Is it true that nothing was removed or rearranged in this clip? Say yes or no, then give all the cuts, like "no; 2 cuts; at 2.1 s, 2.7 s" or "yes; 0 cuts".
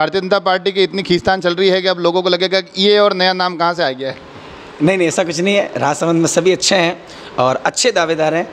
yes; 0 cuts